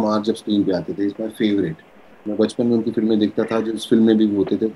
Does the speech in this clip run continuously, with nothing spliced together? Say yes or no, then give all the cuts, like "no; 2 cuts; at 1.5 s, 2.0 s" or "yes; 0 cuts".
yes; 0 cuts